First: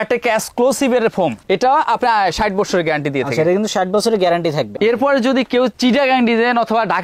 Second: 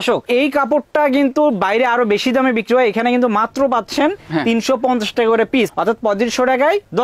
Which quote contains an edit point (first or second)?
first